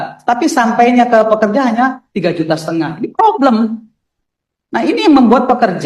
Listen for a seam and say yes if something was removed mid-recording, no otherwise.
no